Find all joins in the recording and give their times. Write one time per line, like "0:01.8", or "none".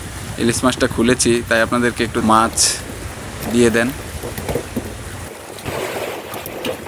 0:02.2